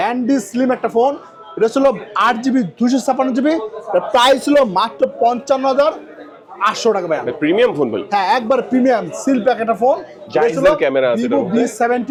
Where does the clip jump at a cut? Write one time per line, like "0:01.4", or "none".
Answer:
none